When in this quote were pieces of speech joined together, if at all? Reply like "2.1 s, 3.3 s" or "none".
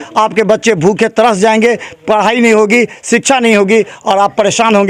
none